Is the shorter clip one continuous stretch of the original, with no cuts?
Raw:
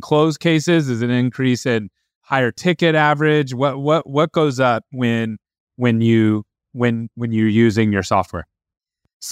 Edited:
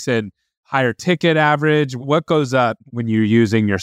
no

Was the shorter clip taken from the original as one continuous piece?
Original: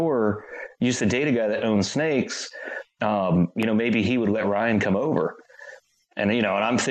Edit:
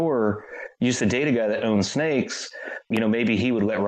no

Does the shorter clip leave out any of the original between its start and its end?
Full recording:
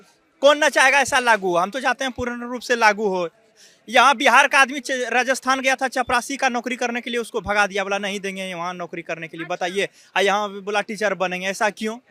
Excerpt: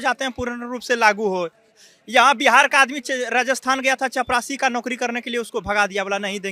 no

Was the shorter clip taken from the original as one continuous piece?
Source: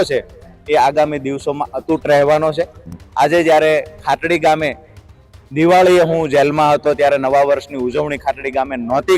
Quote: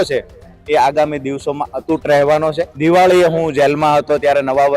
no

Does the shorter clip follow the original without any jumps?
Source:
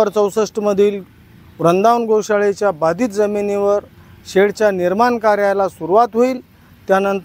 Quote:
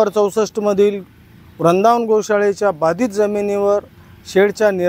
yes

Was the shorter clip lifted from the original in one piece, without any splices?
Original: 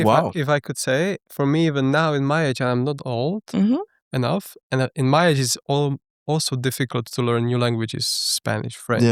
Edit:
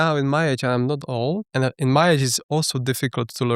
no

